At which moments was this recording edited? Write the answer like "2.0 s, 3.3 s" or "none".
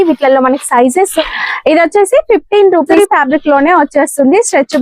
1.2 s, 2.9 s